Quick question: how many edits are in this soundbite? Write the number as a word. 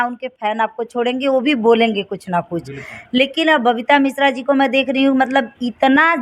zero